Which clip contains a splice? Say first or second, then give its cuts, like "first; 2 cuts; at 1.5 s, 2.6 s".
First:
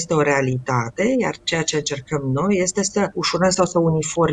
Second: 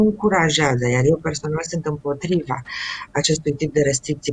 first; 1 cut; at 3.2 s